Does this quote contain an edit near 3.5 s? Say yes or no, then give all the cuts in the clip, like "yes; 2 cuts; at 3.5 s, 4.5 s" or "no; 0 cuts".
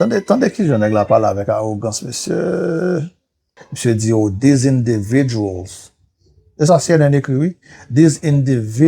yes; 1 cut; at 3.5 s